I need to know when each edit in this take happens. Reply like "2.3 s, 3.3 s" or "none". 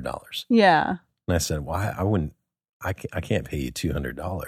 none